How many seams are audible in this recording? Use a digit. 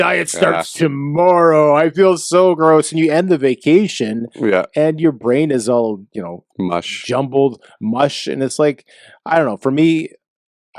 0